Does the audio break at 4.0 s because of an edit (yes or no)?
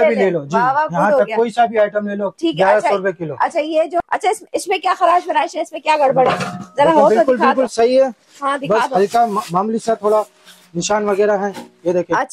yes